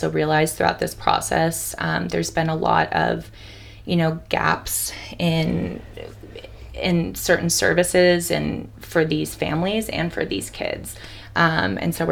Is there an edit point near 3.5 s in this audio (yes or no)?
no